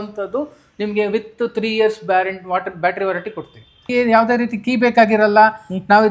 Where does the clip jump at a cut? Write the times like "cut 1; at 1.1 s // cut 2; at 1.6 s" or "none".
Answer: cut 1; at 3.8 s